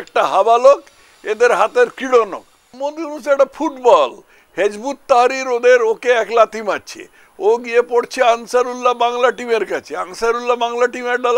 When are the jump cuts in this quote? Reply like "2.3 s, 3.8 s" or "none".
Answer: 2.9 s